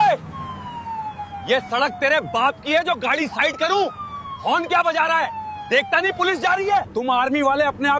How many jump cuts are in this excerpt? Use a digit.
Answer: 1